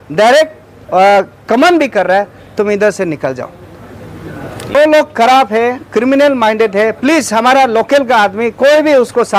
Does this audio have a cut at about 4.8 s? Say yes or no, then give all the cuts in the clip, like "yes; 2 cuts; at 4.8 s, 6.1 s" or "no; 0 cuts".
yes; 1 cut; at 4.8 s